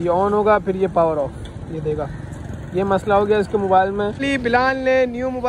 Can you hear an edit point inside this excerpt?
yes; 1 cut; at 4.2 s

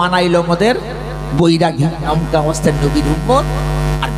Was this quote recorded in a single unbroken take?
no; 1 cut; at 2.0 s

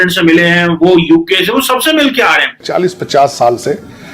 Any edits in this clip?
yes; 1 cut; at 2.7 s

